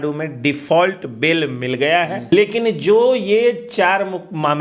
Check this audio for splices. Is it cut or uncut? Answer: cut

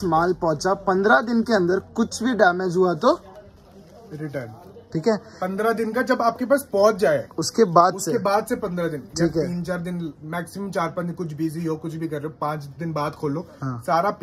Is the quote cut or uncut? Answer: uncut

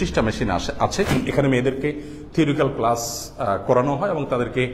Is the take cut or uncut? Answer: cut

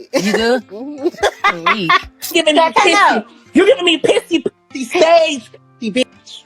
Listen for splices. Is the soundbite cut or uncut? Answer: cut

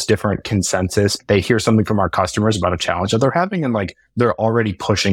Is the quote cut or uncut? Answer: cut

